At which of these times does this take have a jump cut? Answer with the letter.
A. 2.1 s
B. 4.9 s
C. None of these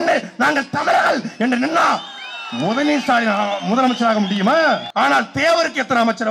B